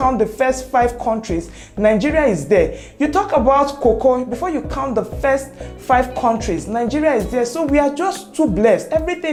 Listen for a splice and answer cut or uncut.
uncut